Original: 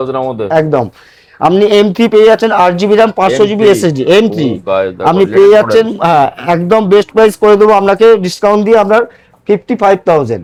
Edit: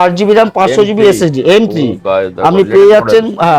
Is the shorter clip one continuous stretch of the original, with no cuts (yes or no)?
yes